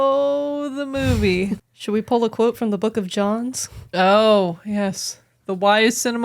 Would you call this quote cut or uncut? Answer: cut